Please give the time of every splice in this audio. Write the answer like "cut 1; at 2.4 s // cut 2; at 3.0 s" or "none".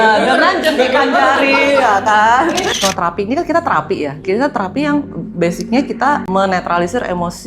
cut 1; at 2.7 s // cut 2; at 6.3 s